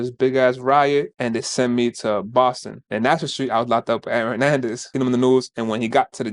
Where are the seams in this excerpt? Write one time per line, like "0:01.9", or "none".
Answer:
0:02.8
0:04.9